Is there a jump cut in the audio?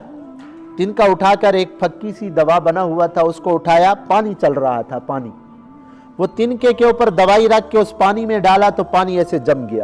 no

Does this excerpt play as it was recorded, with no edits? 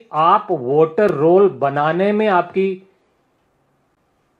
yes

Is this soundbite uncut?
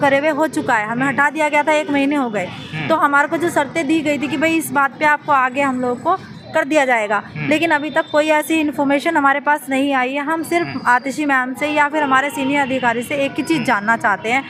yes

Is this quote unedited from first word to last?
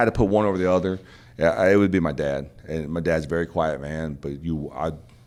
yes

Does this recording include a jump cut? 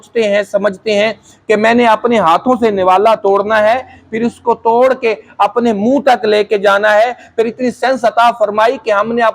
no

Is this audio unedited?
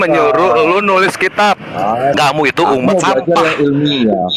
no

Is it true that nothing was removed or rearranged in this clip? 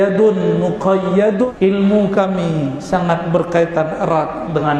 no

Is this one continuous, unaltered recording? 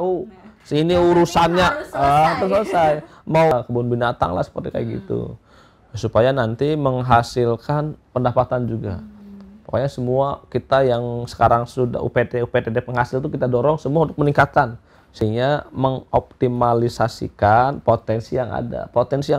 no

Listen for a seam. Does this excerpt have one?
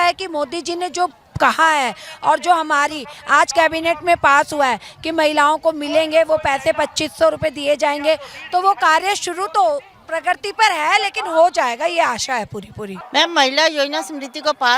yes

